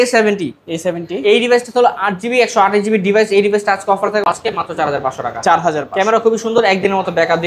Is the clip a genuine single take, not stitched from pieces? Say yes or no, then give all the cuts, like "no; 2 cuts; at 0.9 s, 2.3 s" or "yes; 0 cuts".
no; 1 cut; at 4.3 s